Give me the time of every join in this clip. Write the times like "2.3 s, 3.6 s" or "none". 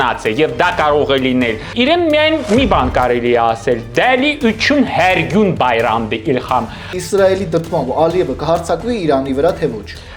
1.7 s, 6.9 s